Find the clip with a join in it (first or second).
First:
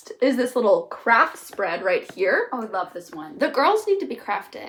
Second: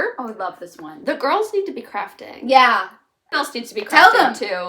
second